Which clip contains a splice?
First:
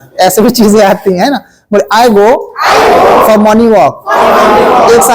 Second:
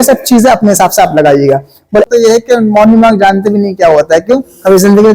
second; 1 cut; at 2.1 s

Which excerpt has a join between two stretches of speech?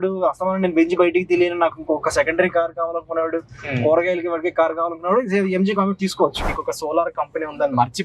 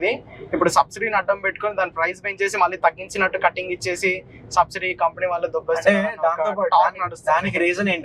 first; 1 cut; at 6.4 s

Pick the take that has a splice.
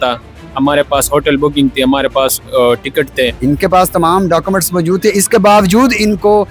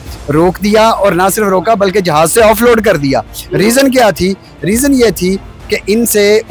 first; 1 cut; at 3.4 s

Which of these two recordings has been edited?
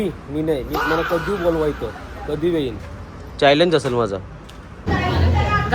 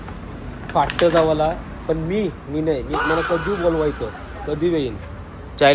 first; 1 cut; at 4.8 s

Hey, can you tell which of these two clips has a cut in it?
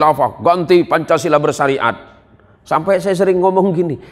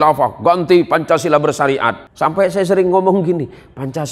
second; 1 cut; at 2.0 s

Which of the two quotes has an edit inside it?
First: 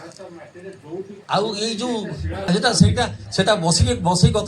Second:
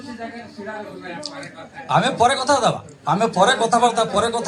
first; 2 cuts; at 1.2 s, 2.5 s

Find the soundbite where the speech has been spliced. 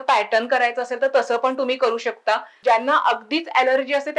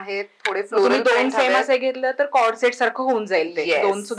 first; 1 cut; at 2.5 s

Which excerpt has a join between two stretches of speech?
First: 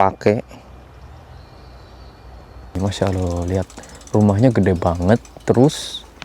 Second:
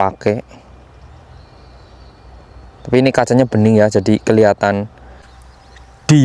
first; 1 cut; at 2.8 s

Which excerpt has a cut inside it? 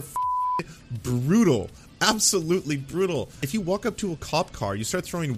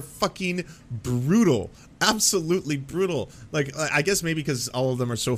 first; 1 cut; at 3.4 s

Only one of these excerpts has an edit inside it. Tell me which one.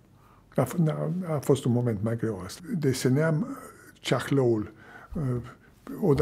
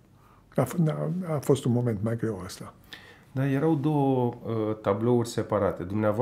first; 1 cut; at 2.5 s

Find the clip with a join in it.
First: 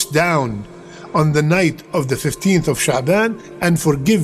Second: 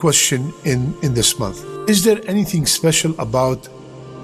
second; 1 cut; at 1.7 s

